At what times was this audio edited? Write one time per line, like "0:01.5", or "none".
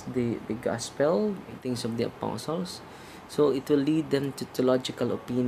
0:01.6